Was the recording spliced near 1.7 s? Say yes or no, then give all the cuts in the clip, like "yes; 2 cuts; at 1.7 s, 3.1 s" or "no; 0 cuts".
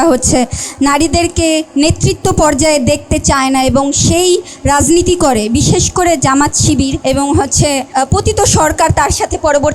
yes; 3 cuts; at 1.7 s, 7.0 s, 7.9 s